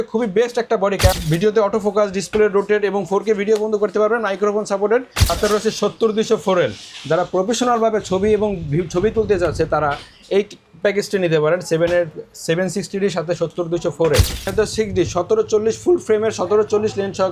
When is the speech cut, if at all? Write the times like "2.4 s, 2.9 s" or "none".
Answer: 1.2 s, 5.2 s, 14.5 s

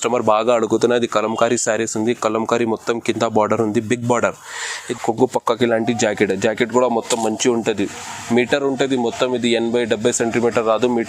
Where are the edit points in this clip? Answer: 4.8 s

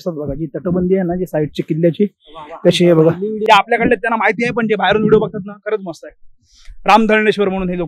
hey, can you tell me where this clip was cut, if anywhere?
3.4 s

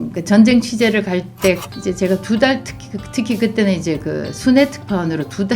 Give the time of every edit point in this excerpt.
1.6 s

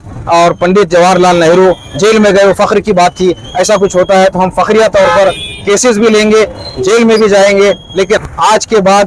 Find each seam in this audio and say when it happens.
8.1 s

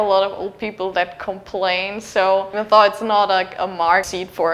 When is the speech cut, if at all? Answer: 2.5 s

